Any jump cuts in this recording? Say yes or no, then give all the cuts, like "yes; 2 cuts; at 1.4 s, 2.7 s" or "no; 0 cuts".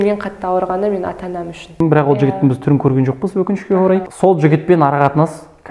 yes; 2 cuts; at 1.7 s, 4.1 s